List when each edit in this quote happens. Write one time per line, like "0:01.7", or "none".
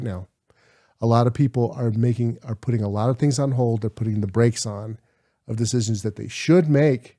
none